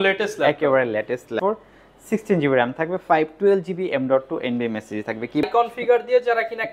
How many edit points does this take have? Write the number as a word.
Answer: two